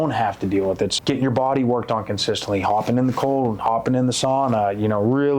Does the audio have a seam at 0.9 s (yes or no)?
yes